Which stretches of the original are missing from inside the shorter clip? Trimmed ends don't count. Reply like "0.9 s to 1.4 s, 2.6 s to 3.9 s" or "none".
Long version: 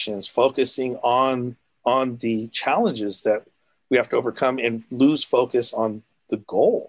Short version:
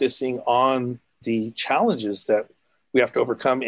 1.8 s to 2.2 s

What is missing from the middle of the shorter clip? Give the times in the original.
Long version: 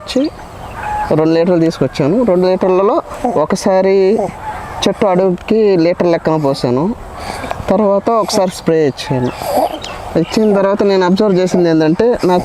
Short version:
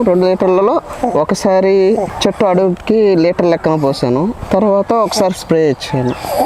4.3 s to 4.7 s, 7.0 s to 7.6 s

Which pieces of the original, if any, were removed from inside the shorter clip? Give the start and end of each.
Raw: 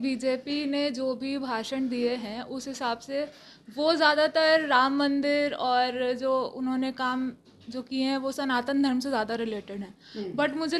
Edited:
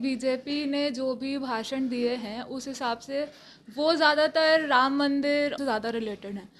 5.6 s to 9.0 s

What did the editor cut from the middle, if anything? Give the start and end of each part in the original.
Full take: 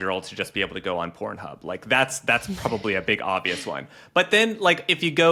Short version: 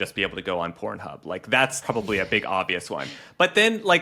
2.2 s to 2.5 s

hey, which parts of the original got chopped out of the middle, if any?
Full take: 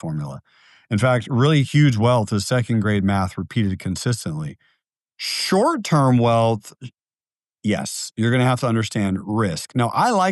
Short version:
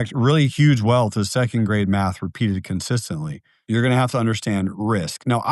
4.7 s to 8.0 s

